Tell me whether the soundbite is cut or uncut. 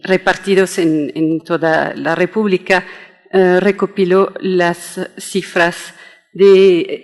uncut